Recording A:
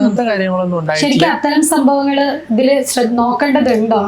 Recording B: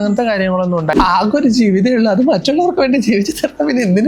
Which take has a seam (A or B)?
B